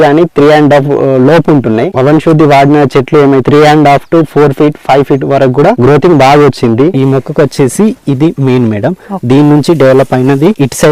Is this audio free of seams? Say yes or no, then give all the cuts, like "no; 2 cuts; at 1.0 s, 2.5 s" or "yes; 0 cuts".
no; 2 cuts; at 3.5 s, 6.9 s